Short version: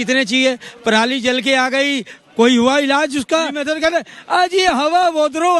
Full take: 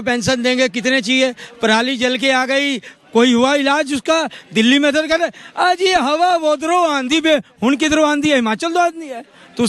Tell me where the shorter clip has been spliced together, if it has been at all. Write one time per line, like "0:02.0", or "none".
0:03.6

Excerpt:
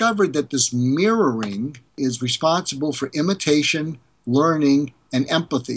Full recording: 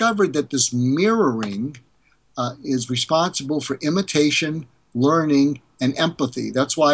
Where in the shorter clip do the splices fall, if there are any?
0:01.9

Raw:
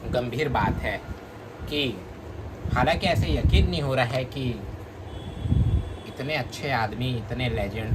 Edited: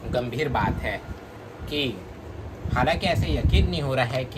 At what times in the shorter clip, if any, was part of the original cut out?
none

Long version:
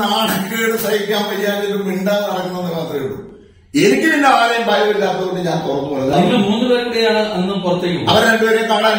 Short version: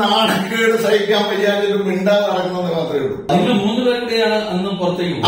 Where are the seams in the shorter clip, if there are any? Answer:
0:03.3

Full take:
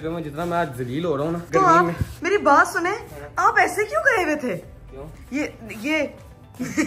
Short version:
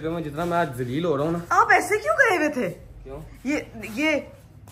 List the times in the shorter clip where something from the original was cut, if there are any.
0:01.4

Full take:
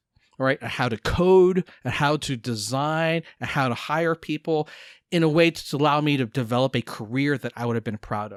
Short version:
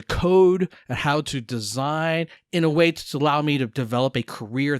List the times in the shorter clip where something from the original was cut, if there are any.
0:02.4

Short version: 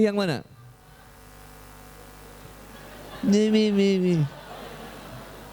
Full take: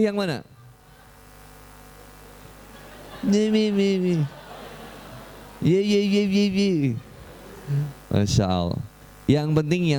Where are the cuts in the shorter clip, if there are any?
none

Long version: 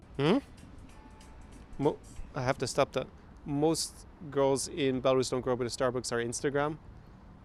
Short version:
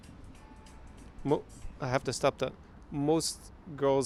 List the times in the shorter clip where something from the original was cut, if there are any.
none

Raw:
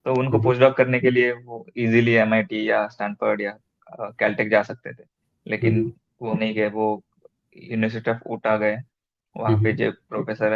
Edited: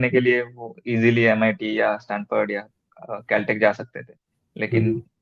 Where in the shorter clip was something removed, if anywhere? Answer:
none

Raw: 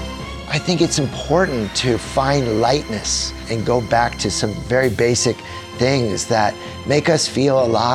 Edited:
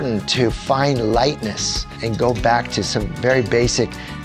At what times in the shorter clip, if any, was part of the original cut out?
none

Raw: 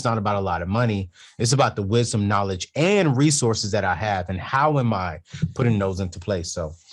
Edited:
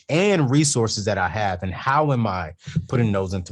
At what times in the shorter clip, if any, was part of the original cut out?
none

